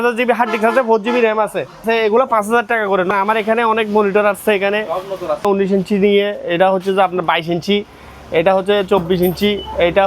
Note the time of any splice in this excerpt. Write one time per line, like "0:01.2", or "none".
0:01.8
0:03.1
0:05.5